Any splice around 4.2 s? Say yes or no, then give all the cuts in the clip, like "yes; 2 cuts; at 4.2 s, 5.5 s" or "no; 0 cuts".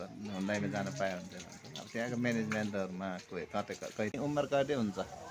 yes; 1 cut; at 4.2 s